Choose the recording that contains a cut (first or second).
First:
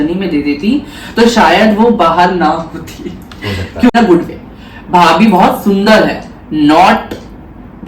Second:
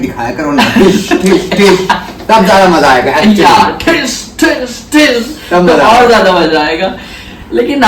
first